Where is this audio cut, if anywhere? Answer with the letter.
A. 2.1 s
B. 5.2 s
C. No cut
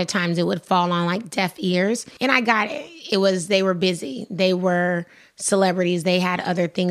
A